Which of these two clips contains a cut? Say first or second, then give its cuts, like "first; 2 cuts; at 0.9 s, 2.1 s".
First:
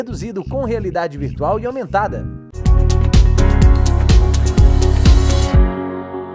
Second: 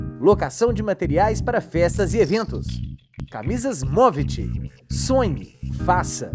first; 1 cut; at 2.5 s